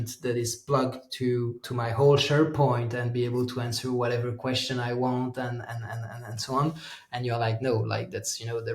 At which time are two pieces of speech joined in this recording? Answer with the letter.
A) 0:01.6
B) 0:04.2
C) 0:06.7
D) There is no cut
A